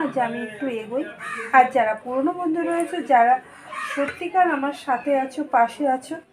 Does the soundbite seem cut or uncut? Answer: uncut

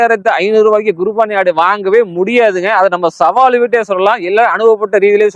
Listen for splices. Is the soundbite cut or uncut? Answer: uncut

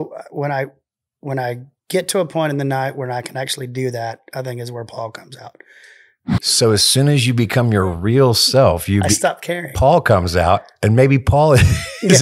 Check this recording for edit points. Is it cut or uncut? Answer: cut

